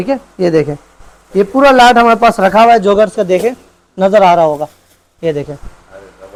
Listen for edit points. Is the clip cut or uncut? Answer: uncut